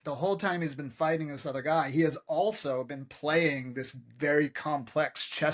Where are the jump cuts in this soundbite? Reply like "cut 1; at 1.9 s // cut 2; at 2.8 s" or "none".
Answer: none